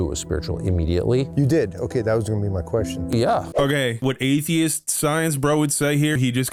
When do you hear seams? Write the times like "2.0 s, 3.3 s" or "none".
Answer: none